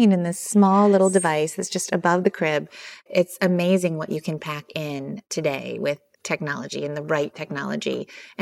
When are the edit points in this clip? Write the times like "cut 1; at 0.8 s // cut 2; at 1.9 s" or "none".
cut 1; at 3.1 s // cut 2; at 5.3 s